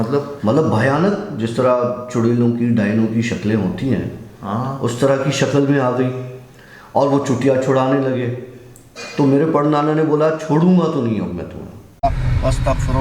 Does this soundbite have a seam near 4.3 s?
no; 1 cut; at 11.9 s

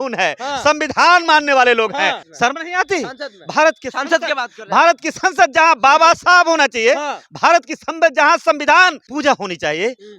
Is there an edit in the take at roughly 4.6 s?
no; 2 cuts; at 2.2 s, 9.0 s

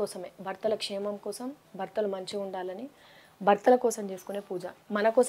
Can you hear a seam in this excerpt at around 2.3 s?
no; 0 cuts

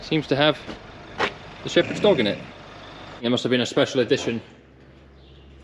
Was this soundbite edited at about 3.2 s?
yes; 1 cut; at 3.2 s

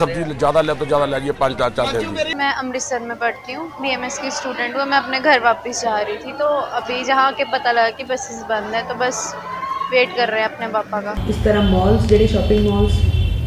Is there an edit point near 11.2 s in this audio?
yes; 2 cuts; at 2.3 s, 11.2 s

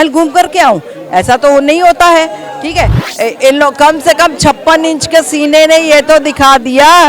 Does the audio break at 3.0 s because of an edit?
yes; 1 cut; at 3.0 s

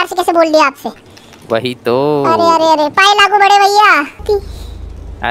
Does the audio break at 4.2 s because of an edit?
yes; 1 cut; at 4.2 s

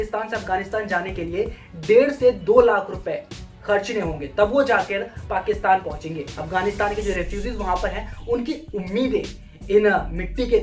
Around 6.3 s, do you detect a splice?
yes; 1 cut; at 6.3 s

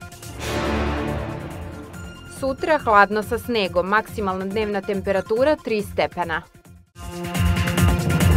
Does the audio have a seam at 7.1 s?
yes; 1 cut; at 7.1 s

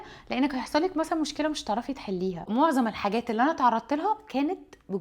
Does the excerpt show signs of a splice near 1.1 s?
no; 1 cut; at 2.4 s

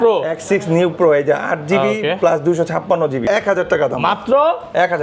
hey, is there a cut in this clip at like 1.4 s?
no; 1 cut; at 3.2 s

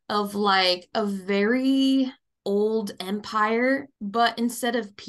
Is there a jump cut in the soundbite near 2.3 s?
yes; 2 cuts; at 2.3 s, 4.0 s

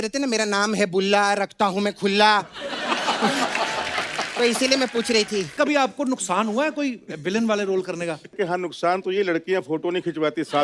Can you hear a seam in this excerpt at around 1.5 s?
no; 2 cuts; at 5.5 s, 8.4 s

